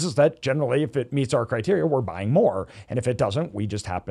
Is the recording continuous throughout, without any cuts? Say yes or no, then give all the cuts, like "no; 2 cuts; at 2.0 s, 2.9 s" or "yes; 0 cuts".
yes; 0 cuts